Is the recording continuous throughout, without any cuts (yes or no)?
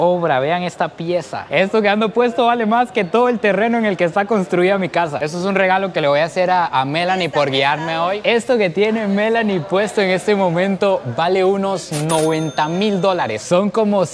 no